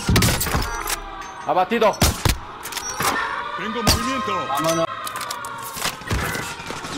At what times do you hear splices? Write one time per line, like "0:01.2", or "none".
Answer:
0:04.8